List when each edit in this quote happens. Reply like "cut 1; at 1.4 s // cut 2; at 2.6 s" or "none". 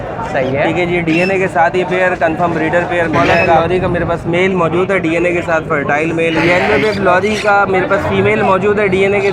cut 1; at 3.6 s // cut 2; at 6.4 s